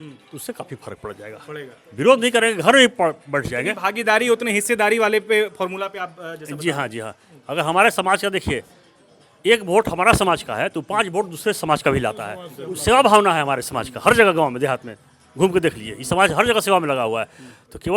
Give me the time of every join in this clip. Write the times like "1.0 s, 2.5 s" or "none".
none

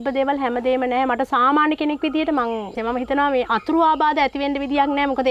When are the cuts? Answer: 2.8 s

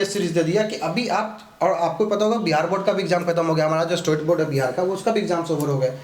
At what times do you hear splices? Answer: none

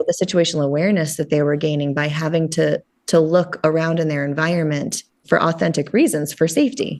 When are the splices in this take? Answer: none

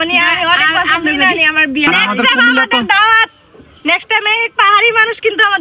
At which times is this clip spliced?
1.9 s

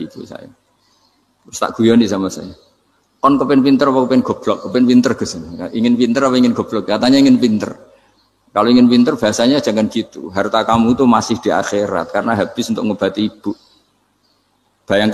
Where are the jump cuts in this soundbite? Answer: none

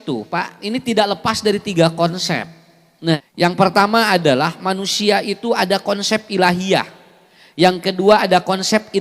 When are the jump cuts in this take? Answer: 3.2 s

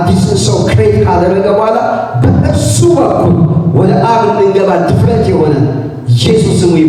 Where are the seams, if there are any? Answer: none

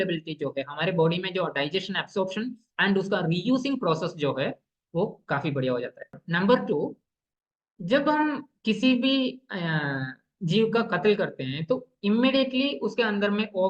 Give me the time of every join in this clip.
6.2 s

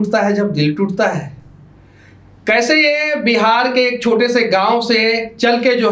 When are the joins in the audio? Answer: none

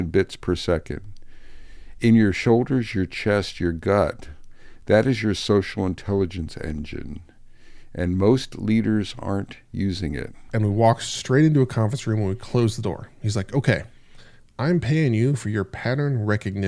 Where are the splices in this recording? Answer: 10.4 s

